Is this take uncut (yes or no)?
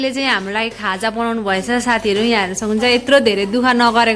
yes